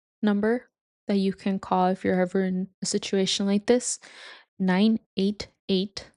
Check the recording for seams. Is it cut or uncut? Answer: cut